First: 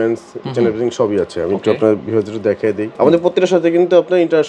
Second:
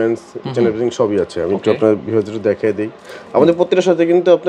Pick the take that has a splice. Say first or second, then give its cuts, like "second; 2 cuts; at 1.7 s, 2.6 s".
first; 1 cut; at 2.9 s